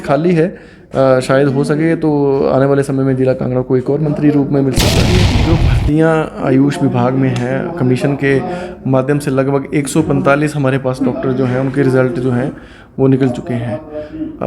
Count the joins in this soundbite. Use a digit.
1